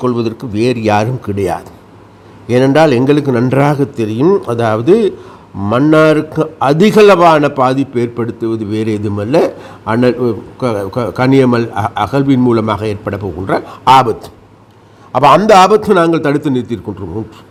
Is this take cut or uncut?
uncut